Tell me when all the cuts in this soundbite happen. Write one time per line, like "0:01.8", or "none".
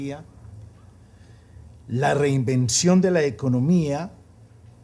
0:02.2

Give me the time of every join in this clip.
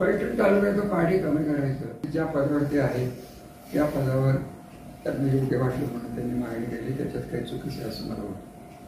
0:02.1

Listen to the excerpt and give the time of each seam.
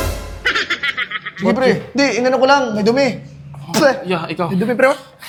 none

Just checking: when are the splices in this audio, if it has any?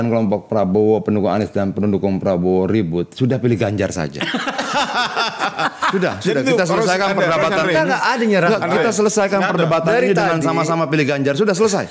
none

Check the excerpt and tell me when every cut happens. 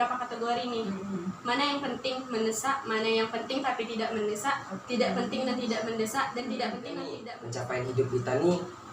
0:07.2

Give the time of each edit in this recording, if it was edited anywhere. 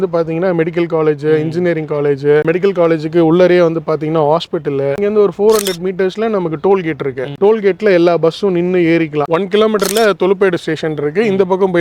0:02.5
0:05.0
0:09.2

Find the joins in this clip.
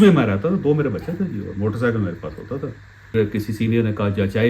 0:03.1

